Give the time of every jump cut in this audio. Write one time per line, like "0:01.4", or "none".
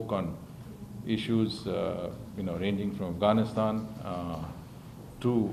none